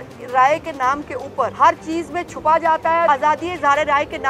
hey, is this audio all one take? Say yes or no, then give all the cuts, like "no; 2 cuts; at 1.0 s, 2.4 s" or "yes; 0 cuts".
no; 2 cuts; at 1.5 s, 3.1 s